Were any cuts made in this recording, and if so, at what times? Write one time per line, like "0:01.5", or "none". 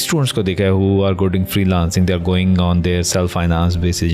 none